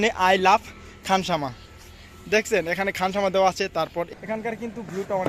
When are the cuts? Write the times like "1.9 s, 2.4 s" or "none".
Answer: 4.1 s